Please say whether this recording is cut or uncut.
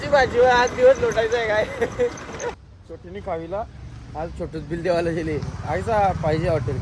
cut